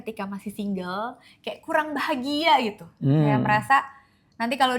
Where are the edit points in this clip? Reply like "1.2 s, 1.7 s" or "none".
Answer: none